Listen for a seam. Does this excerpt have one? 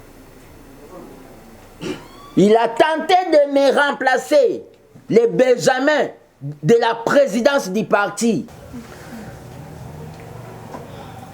yes; 1 cut; at 8.5 s

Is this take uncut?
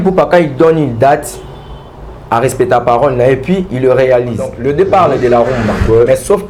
no; 1 cut; at 4.6 s

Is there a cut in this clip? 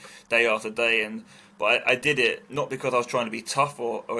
no; 0 cuts

